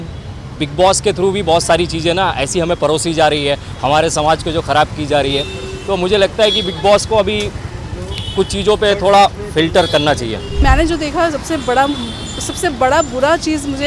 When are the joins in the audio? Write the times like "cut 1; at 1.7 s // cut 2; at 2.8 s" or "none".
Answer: cut 1; at 10.6 s